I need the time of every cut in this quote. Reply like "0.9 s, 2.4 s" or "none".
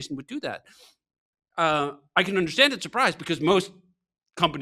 none